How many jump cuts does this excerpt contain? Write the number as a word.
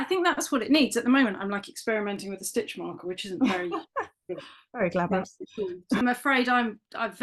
one